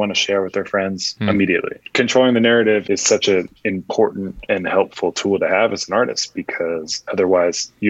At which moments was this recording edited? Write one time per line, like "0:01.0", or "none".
0:01.1
0:01.8
0:02.8
0:04.3
0:07.1

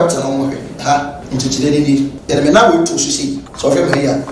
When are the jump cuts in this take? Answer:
0:01.2
0:02.2
0:03.5

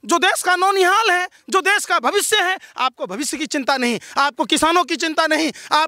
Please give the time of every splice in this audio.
none

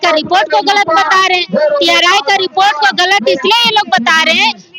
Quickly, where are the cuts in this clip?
none

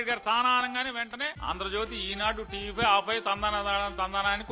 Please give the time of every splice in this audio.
0:01.4

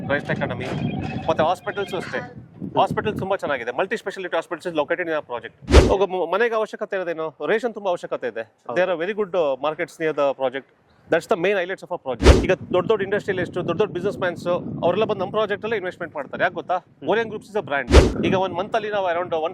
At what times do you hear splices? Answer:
0:05.6
0:12.3
0:18.0

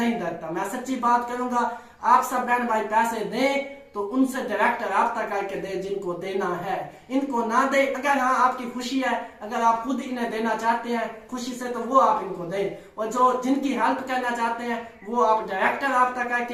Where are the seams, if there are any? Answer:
none

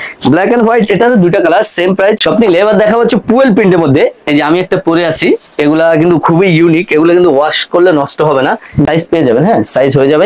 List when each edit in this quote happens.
0:02.2
0:08.9

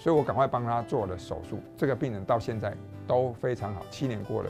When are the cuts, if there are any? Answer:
none

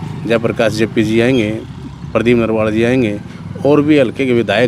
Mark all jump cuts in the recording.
none

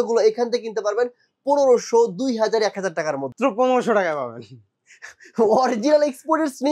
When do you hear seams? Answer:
0:03.3

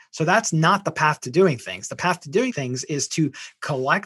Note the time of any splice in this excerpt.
0:02.5

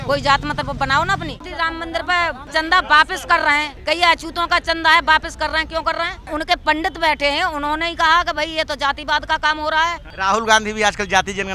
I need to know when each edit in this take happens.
0:01.4
0:02.5
0:03.7
0:06.2
0:10.1

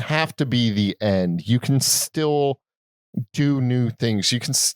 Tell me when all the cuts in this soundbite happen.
none

